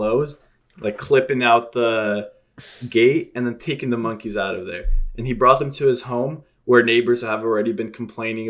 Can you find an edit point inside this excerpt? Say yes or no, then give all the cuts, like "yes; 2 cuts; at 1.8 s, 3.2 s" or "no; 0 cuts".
no; 0 cuts